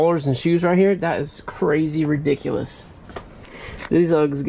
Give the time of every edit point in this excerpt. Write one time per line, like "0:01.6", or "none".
0:03.3